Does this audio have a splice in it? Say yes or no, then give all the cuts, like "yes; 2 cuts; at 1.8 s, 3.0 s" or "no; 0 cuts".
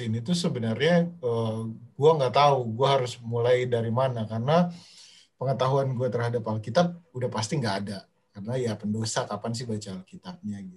no; 0 cuts